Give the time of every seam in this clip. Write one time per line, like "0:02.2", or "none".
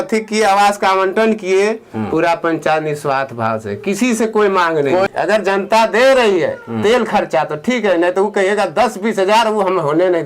0:05.1

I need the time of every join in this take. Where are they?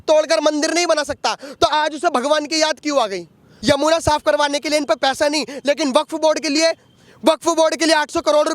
0:03.5

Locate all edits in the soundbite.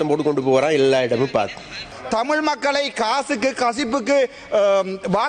0:01.9

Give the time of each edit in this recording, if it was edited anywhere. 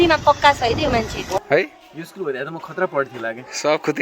0:01.3

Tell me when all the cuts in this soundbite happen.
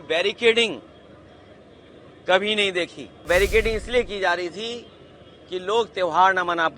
0:03.3

